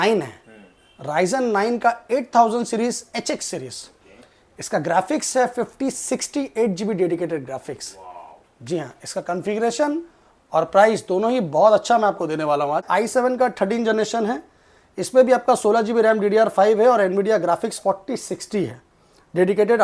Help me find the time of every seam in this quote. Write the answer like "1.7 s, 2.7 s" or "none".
12.8 s

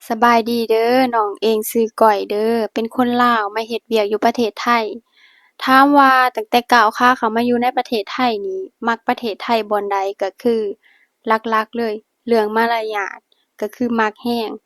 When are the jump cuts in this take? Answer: none

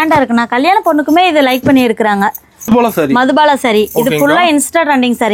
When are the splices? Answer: 2.7 s

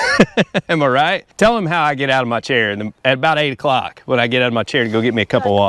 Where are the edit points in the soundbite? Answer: 1.2 s, 3.0 s

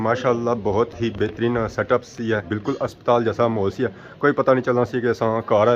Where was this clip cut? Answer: 2.5 s

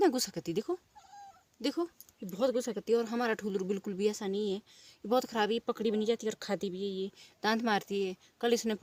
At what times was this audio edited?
none

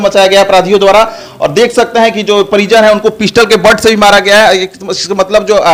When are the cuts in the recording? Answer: none

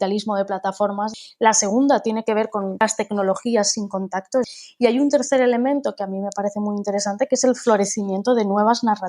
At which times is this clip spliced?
1.2 s, 2.8 s, 4.4 s

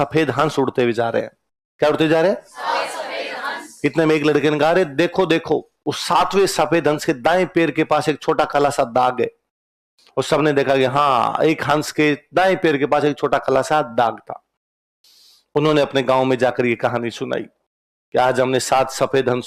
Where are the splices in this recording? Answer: none

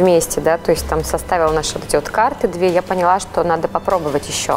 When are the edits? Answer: none

